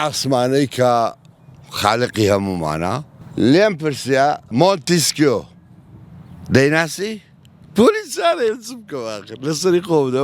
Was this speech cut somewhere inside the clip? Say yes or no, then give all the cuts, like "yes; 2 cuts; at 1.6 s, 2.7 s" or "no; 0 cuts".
yes; 2 cuts; at 3.1 s, 4.5 s